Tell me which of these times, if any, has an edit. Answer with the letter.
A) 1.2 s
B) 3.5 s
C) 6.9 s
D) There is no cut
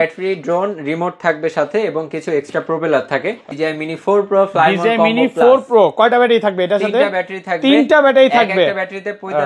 B